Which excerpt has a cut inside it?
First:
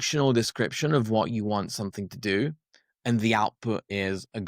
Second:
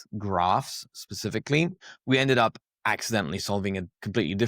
second; 1 cut; at 1.9 s

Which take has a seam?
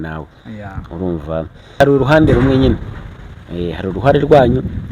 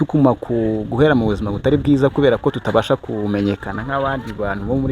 first; 1 cut; at 1.8 s

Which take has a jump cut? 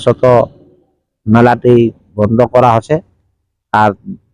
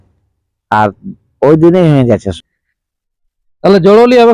second; 1 cut; at 2.3 s

